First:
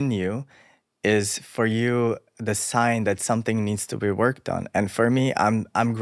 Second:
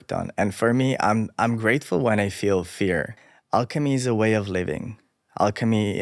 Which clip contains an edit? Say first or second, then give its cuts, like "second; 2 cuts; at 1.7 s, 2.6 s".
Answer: second; 1 cut; at 3.2 s